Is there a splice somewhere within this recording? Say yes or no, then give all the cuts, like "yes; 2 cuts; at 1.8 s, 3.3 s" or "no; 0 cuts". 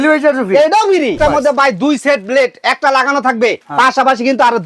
yes; 2 cuts; at 1.2 s, 3.6 s